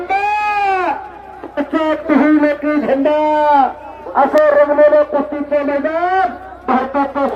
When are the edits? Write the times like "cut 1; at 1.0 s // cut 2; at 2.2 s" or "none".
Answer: none